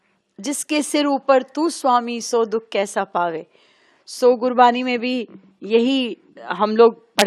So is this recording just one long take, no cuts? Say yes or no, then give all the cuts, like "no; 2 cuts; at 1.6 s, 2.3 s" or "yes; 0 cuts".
yes; 0 cuts